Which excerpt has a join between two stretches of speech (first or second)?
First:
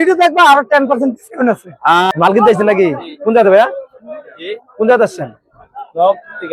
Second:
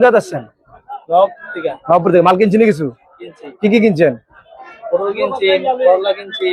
first